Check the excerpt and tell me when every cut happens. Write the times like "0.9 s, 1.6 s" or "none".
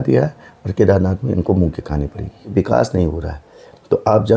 2.5 s